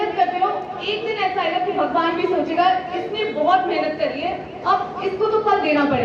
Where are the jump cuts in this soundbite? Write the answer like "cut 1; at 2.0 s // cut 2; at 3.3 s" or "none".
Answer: none